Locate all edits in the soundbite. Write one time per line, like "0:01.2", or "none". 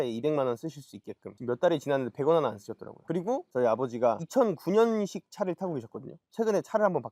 0:06.2